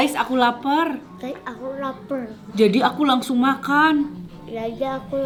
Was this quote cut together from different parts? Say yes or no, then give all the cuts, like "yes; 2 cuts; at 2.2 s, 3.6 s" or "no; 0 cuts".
no; 0 cuts